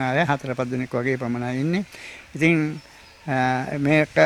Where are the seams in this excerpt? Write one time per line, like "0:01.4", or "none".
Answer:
none